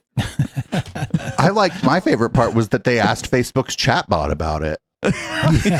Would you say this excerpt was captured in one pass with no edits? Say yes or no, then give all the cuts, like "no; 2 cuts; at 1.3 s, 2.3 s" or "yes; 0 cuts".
yes; 0 cuts